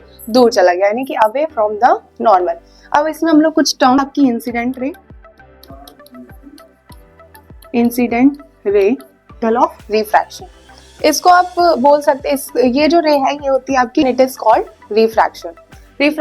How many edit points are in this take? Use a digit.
3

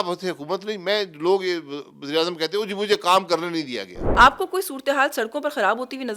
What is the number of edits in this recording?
1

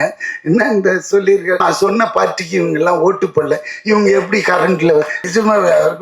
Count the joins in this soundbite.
2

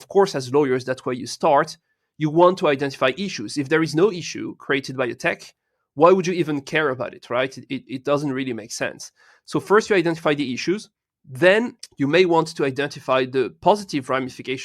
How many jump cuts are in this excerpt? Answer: 1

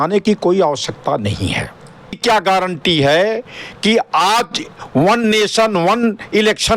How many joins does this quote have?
1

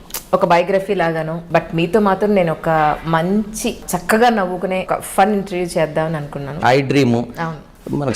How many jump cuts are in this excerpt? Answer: 4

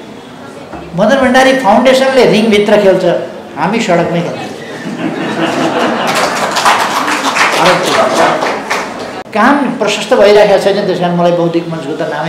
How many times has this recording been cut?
1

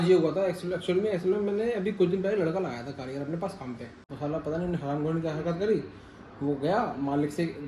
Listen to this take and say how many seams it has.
1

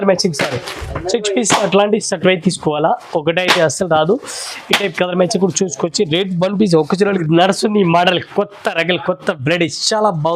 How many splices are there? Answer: 1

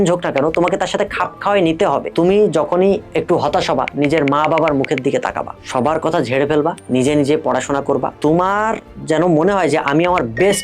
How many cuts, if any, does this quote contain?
4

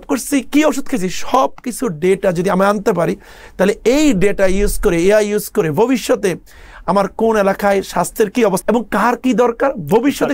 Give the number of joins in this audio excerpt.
1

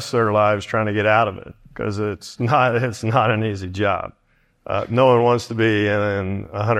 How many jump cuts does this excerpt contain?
0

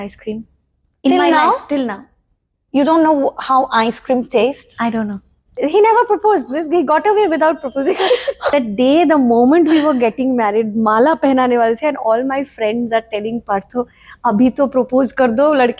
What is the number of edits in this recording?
2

